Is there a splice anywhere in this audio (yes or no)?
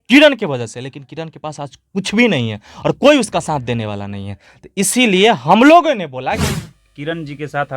yes